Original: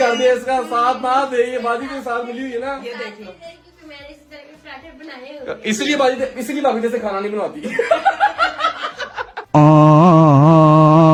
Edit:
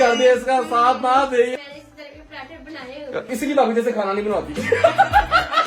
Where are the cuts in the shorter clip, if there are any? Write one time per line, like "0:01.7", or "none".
0:01.5
0:03.3